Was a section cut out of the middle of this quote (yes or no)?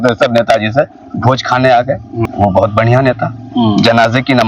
yes